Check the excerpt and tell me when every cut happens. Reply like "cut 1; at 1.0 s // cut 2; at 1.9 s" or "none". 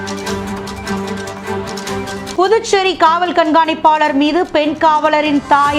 cut 1; at 2.3 s